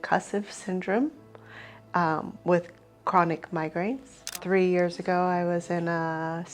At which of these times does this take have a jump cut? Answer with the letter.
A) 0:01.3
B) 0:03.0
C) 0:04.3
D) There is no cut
C